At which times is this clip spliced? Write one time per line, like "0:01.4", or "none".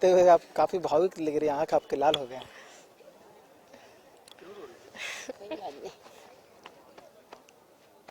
none